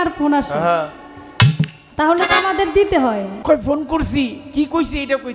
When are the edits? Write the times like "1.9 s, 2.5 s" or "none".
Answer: 3.3 s

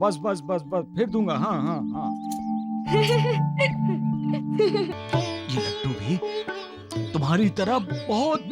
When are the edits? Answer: 4.9 s

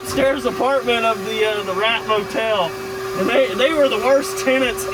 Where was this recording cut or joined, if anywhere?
none

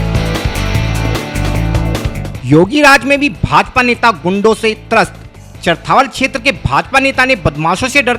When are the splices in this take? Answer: 2.3 s

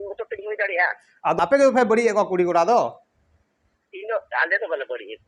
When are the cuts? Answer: 1.4 s

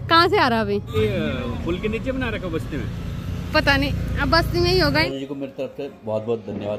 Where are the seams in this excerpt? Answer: 0.9 s, 5.1 s

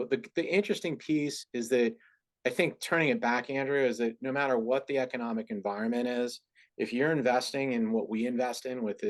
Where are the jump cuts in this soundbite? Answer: none

